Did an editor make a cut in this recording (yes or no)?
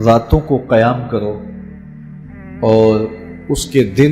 no